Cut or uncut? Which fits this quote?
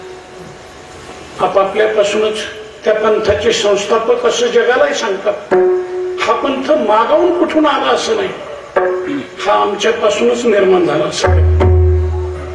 uncut